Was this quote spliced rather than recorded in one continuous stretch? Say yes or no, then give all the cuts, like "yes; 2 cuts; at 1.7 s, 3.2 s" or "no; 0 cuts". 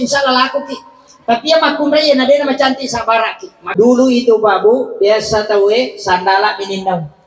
yes; 1 cut; at 3.6 s